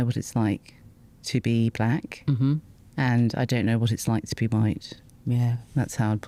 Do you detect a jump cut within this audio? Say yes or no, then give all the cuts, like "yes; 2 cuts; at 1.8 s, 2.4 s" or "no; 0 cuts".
no; 0 cuts